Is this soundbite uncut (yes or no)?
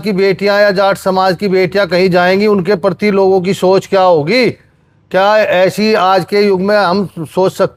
yes